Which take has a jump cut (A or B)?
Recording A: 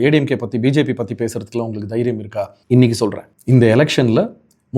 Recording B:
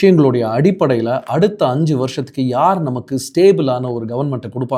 A